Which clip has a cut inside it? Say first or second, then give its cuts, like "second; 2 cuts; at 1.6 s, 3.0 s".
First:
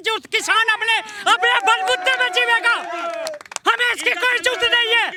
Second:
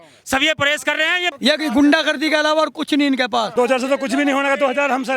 second; 2 cuts; at 1.3 s, 3.5 s